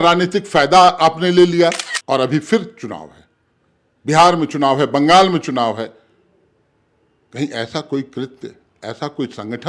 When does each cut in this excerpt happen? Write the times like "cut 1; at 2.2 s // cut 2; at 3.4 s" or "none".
cut 1; at 1.9 s